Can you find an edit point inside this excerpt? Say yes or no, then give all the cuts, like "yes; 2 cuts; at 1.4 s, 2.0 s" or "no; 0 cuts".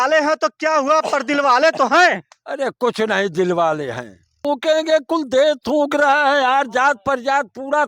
yes; 1 cut; at 4.4 s